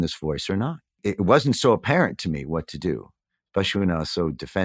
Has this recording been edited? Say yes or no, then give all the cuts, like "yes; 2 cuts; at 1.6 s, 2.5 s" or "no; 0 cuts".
yes; 1 cut; at 1.0 s